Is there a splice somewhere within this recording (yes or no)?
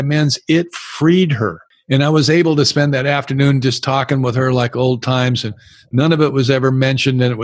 yes